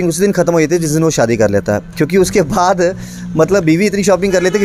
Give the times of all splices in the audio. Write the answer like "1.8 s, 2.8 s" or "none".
none